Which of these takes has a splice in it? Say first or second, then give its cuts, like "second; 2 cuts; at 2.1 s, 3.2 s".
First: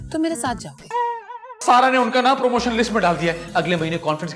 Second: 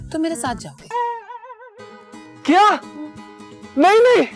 first; 1 cut; at 1.6 s